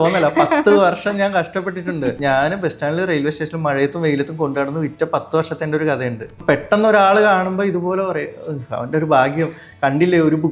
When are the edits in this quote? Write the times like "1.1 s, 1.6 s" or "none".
2.2 s, 6.3 s

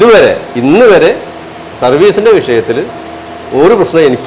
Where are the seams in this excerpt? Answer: none

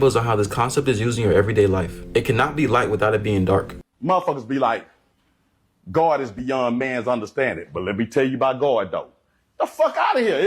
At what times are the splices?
3.9 s

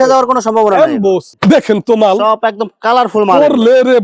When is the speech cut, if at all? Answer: 1.3 s

